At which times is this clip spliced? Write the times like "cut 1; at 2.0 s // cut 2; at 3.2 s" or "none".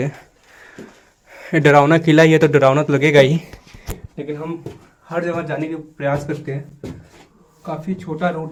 none

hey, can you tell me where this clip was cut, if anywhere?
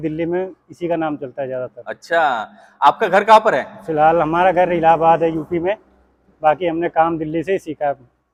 none

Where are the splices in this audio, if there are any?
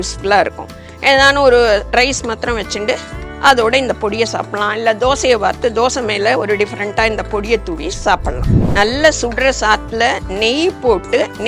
cut 1; at 8.6 s

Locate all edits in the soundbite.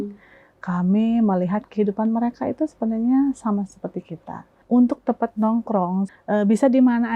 cut 1; at 4.6 s // cut 2; at 6.1 s

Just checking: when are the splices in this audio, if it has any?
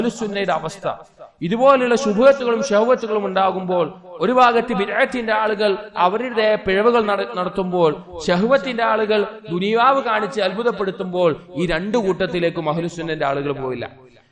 none

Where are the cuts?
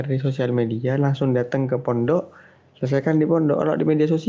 none

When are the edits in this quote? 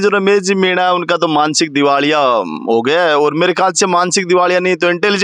none

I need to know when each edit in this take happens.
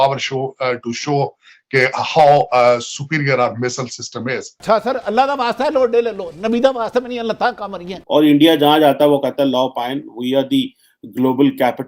cut 1; at 4.5 s // cut 2; at 8.0 s

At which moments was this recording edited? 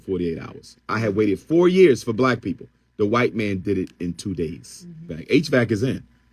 cut 1; at 5.1 s

